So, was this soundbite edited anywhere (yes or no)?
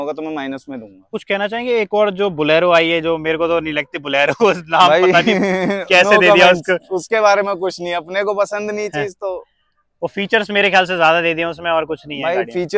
yes